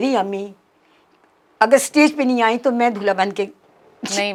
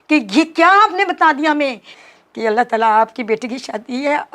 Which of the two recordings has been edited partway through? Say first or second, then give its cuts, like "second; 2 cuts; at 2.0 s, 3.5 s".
second; 1 cut; at 1.9 s